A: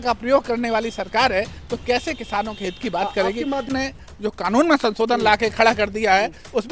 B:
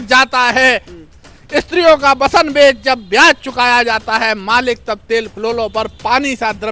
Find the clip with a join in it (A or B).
A